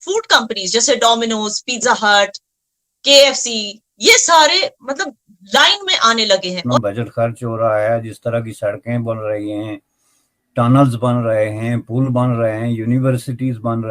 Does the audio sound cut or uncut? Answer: cut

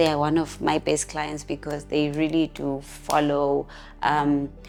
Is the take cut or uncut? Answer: uncut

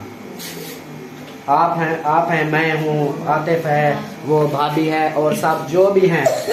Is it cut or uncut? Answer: uncut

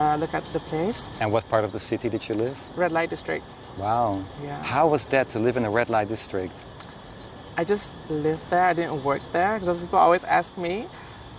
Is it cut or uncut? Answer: cut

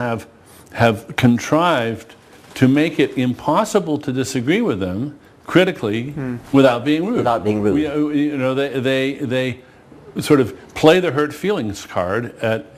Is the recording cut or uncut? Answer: cut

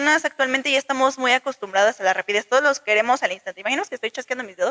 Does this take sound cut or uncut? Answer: uncut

